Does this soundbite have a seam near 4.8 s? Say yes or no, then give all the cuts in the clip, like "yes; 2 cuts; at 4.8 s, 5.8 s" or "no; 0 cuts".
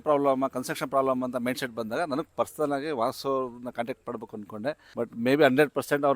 yes; 1 cut; at 4.8 s